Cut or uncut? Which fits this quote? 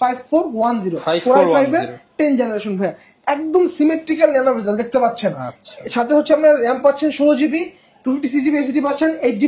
uncut